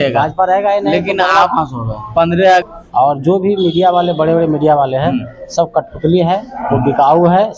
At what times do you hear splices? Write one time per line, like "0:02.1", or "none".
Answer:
0:02.6